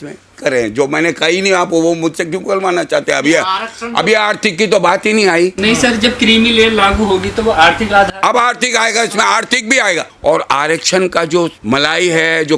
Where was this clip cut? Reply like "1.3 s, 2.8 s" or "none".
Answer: 10.1 s, 11.6 s